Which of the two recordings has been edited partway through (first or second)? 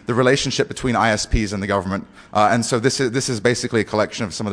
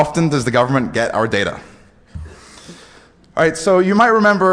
first